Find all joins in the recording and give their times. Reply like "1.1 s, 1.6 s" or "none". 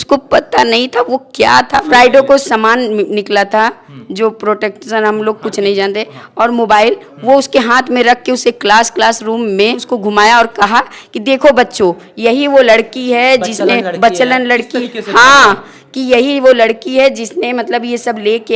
1.9 s, 9.9 s

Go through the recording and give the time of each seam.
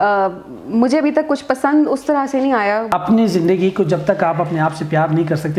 2.9 s

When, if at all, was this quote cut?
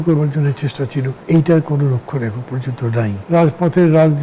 1.1 s, 3.1 s

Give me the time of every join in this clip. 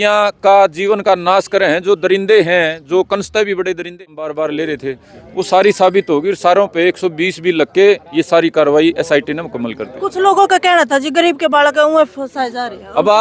3.9 s

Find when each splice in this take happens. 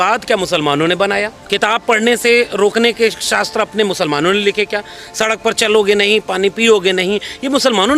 1.4 s

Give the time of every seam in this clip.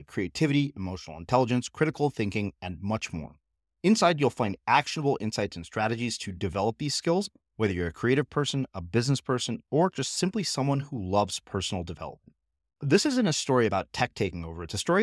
none

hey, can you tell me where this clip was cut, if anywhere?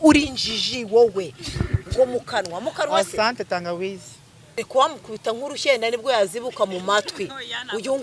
4.6 s

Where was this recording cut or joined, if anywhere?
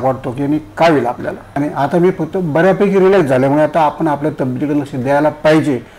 1.4 s

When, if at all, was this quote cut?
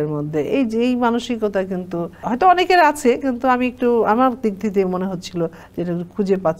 2.2 s, 5.7 s

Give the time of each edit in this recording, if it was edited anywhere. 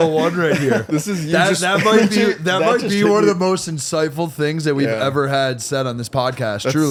none

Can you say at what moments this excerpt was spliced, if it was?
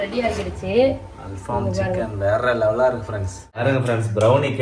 3.6 s

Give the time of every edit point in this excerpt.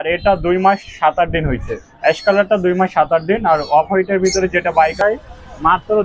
5.0 s

